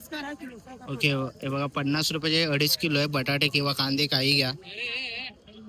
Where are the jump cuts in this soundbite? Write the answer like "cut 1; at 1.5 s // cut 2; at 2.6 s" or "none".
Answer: none